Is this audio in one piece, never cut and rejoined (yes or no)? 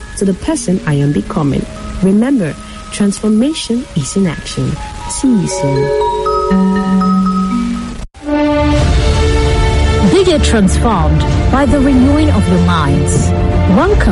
no